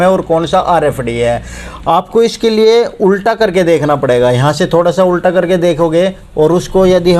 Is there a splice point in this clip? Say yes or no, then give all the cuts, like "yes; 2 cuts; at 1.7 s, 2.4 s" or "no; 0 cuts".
no; 0 cuts